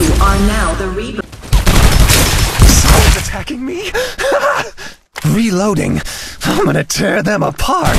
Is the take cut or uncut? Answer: cut